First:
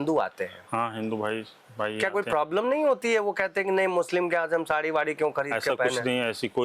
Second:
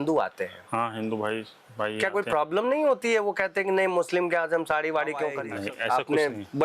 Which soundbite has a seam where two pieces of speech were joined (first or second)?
second